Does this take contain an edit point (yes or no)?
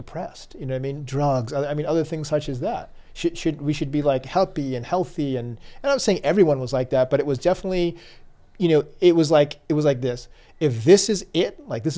no